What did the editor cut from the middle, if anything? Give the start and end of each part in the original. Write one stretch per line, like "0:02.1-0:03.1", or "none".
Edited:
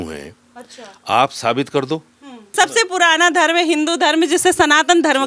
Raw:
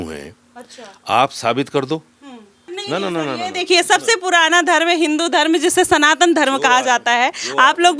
0:02.5-0:03.9